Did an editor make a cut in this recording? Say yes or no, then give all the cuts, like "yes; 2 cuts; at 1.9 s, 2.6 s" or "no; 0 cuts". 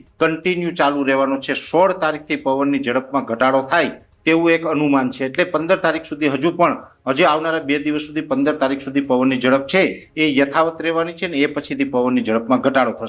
no; 0 cuts